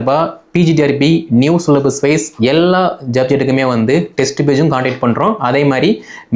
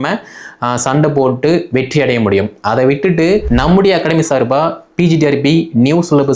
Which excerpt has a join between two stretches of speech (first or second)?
second